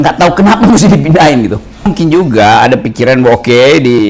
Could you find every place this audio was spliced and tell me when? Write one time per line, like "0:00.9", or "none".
0:01.9